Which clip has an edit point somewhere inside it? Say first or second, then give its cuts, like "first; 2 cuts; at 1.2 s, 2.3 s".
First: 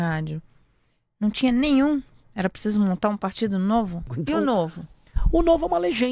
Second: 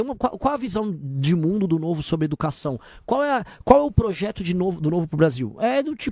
first; 1 cut; at 4.1 s